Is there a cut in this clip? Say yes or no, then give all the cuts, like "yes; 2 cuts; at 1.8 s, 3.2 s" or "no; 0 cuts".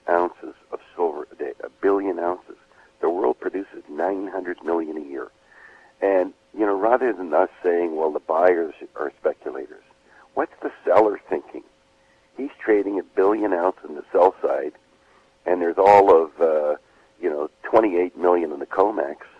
no; 0 cuts